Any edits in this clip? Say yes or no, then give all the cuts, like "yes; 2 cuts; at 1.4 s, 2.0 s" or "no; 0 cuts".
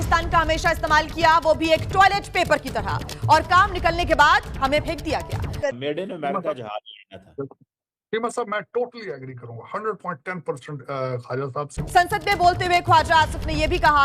yes; 2 cuts; at 5.4 s, 11.8 s